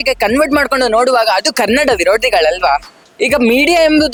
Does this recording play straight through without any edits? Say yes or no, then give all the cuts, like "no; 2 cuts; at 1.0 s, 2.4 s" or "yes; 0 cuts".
yes; 0 cuts